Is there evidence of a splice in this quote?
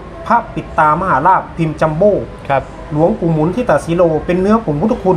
no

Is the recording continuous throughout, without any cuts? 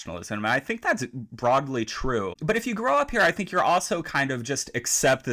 no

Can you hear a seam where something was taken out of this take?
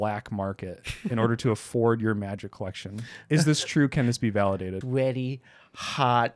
yes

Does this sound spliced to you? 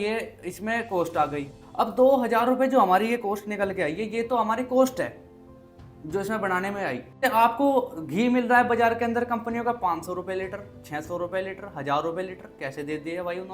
yes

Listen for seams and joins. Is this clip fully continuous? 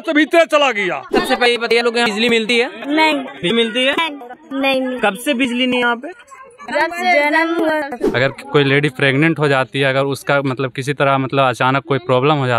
no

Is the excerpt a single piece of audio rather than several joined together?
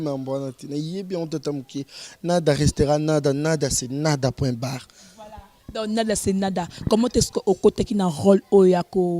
yes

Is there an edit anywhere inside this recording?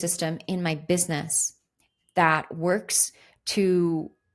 no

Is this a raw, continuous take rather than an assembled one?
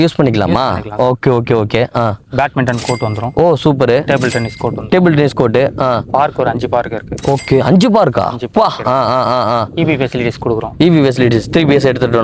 yes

